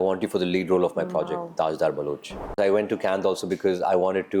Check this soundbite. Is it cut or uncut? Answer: cut